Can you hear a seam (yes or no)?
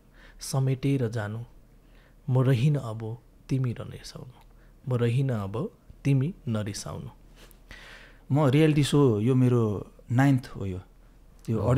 yes